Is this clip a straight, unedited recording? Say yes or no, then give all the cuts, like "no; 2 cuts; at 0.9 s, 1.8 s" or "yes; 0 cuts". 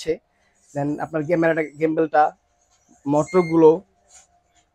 yes; 0 cuts